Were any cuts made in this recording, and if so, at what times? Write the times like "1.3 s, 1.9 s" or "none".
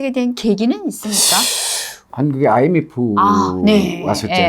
2.1 s